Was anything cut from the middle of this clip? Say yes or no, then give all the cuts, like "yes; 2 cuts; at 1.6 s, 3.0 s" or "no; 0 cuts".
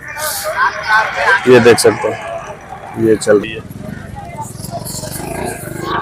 yes; 1 cut; at 3.4 s